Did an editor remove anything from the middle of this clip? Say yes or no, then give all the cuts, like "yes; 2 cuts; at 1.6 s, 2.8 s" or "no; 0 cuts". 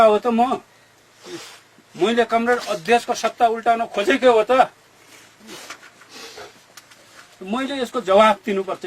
no; 0 cuts